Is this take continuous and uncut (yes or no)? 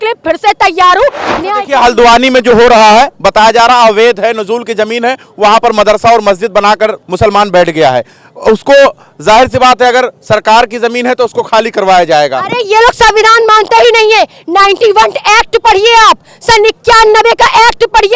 no